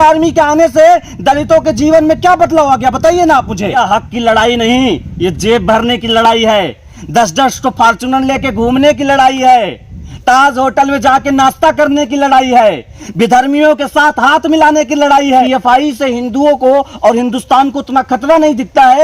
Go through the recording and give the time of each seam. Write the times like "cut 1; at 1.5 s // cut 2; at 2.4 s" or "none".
cut 1; at 3.8 s // cut 2; at 15.4 s